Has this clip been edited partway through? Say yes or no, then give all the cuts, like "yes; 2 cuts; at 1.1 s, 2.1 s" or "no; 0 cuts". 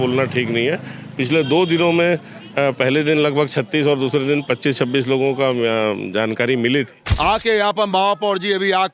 yes; 1 cut; at 7.0 s